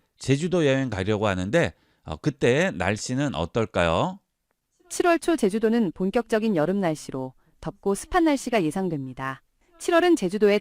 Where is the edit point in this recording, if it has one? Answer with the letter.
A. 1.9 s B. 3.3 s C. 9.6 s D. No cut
C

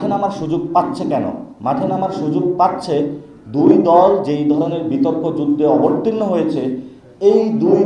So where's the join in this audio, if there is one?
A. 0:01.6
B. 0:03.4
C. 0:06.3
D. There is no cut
D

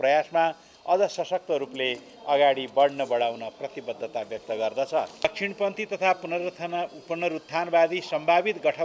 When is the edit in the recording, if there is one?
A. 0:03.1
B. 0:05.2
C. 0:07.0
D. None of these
B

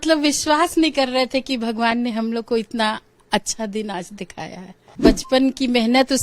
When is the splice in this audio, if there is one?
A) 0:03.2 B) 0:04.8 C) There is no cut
B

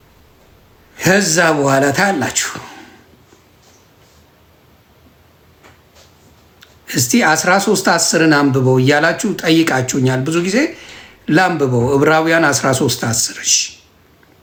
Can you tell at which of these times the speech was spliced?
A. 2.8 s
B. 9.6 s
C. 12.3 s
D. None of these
D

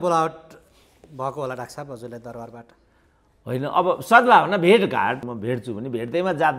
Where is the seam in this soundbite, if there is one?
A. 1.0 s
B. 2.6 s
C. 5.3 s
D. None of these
C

